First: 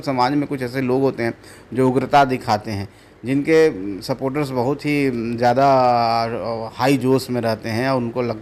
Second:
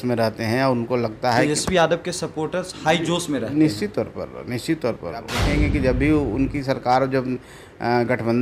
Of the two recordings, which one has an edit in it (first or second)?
second